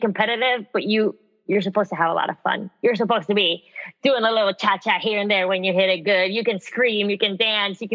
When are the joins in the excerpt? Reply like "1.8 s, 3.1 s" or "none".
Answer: none